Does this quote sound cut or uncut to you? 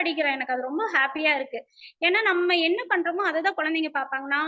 uncut